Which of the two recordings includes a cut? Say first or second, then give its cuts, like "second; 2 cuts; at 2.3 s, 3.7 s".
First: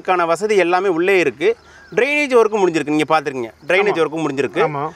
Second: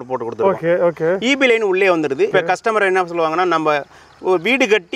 second; 1 cut; at 2.3 s